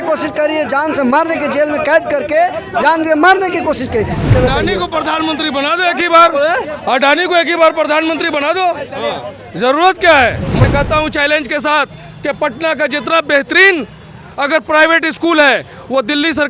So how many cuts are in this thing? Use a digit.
2